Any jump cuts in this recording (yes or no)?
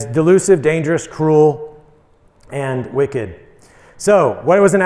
no